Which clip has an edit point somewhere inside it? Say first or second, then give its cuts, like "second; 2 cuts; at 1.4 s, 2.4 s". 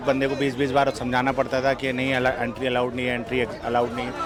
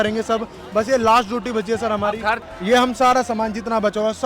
second; 1 cut; at 2.4 s